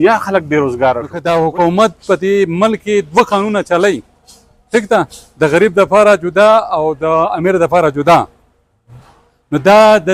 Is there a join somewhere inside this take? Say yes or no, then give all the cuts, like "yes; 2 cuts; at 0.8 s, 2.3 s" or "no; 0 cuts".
yes; 1 cut; at 1.1 s